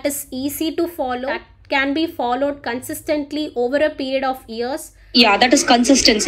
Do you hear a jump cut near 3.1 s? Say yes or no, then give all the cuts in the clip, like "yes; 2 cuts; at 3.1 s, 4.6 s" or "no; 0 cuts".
no; 2 cuts; at 1.5 s, 4.9 s